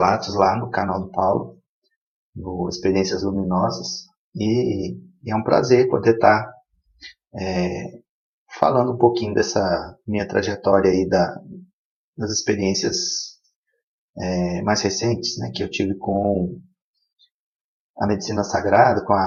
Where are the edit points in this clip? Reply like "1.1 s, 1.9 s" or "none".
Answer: none